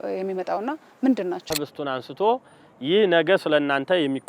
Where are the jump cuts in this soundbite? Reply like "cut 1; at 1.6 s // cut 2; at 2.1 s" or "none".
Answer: cut 1; at 1.5 s